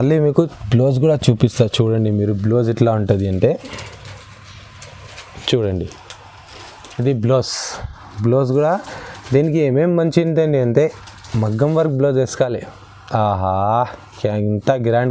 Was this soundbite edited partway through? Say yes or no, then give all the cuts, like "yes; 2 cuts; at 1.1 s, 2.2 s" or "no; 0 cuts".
no; 0 cuts